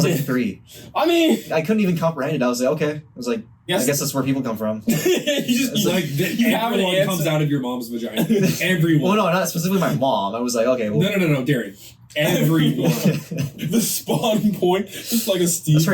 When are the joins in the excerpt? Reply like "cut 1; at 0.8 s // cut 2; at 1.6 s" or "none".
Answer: cut 1; at 1.5 s // cut 2; at 3.7 s // cut 3; at 13.6 s